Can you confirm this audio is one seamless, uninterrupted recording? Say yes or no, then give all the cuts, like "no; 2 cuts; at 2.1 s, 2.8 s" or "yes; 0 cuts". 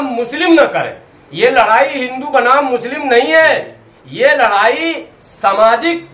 yes; 0 cuts